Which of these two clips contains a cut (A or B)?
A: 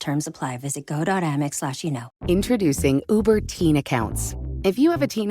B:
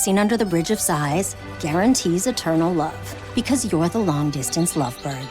A